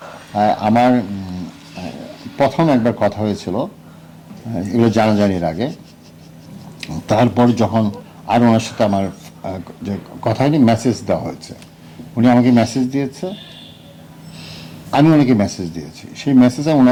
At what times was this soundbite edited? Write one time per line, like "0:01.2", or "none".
none